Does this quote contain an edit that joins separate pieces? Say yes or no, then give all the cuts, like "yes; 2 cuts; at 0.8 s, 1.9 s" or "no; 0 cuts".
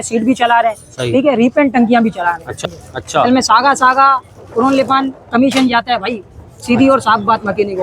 yes; 1 cut; at 2.6 s